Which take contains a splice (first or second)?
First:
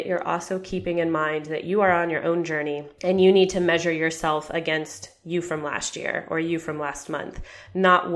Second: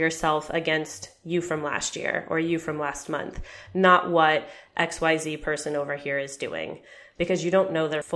first